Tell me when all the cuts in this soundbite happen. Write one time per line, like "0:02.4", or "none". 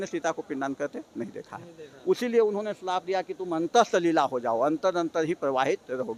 none